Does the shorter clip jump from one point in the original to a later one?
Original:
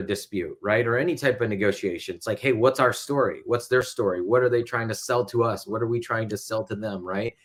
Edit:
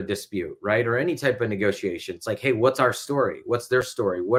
no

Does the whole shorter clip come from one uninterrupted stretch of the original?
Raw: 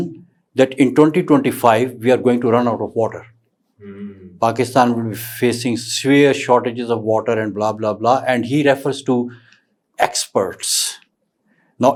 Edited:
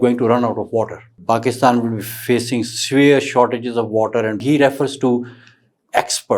no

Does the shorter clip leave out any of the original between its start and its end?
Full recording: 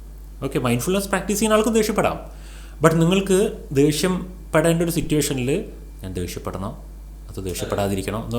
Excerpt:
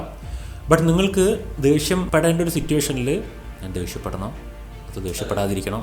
yes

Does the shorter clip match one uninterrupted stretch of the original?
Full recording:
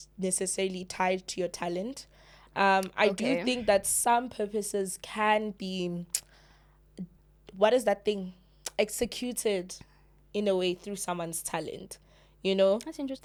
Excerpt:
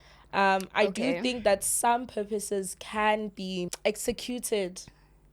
no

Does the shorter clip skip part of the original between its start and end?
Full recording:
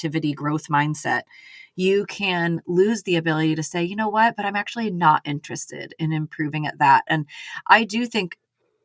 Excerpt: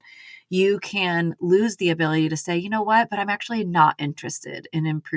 no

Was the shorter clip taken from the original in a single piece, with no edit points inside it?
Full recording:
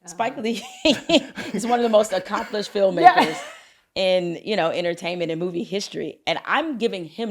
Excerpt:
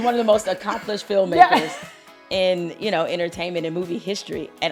yes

